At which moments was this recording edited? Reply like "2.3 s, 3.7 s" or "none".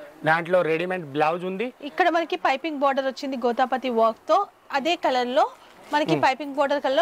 none